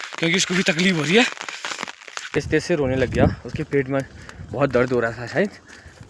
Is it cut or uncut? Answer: cut